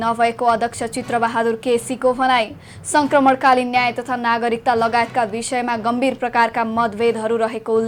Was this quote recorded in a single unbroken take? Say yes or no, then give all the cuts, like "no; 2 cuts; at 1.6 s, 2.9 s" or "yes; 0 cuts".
yes; 0 cuts